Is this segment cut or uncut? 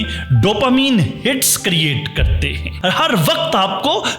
cut